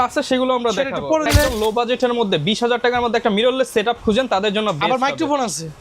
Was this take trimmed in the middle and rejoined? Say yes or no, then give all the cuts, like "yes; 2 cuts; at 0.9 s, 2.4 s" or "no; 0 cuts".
yes; 1 cut; at 1.3 s